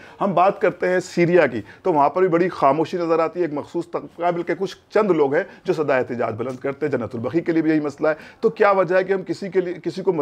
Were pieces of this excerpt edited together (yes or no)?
no